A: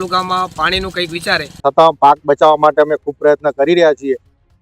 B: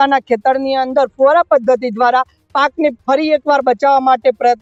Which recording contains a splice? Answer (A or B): A